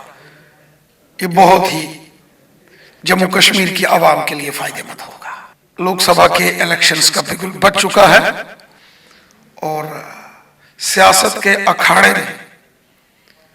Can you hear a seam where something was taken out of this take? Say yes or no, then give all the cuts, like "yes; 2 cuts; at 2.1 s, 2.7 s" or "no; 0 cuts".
yes; 1 cut; at 5.6 s